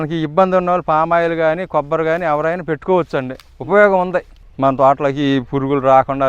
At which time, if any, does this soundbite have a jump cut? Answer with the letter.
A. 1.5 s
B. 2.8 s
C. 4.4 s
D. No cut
C